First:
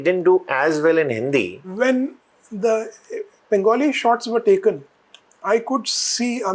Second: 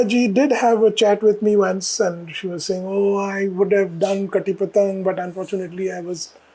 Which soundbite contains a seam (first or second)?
first